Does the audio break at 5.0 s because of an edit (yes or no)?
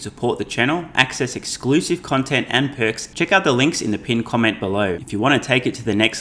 yes